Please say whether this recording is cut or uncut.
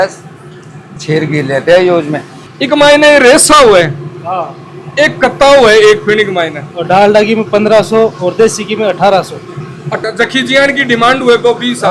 cut